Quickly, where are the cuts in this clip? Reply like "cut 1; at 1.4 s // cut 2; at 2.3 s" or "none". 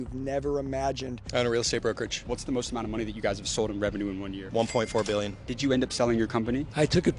cut 1; at 1.2 s // cut 2; at 2.2 s // cut 3; at 4.4 s // cut 4; at 5.5 s

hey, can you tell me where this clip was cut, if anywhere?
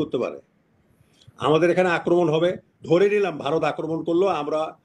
none

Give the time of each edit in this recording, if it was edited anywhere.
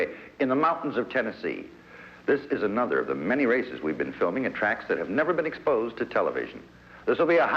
none

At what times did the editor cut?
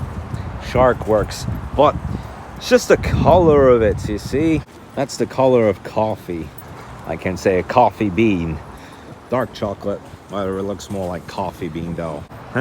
none

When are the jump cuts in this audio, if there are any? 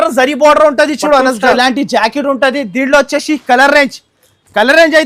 cut 1; at 1.6 s

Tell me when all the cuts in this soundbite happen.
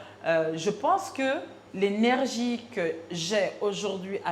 cut 1; at 1.6 s

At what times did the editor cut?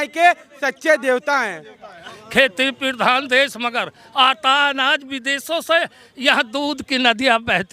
cut 1; at 2.1 s

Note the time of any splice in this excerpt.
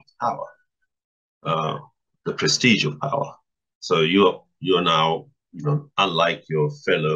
none

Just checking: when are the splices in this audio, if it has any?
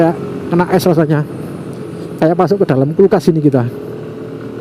none

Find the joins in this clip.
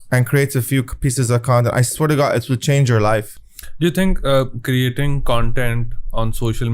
none

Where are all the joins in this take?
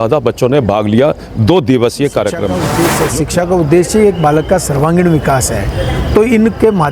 cut 1; at 2.8 s

